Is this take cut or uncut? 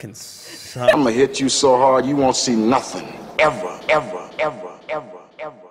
cut